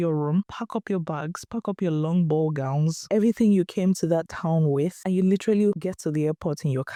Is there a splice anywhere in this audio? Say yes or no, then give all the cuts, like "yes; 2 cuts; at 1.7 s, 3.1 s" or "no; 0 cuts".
no; 0 cuts